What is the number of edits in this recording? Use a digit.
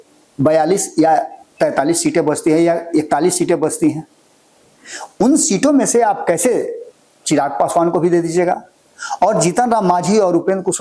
0